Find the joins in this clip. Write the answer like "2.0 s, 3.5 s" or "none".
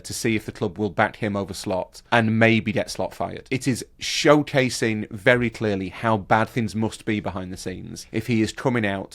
2.0 s, 3.5 s, 6.5 s, 7.9 s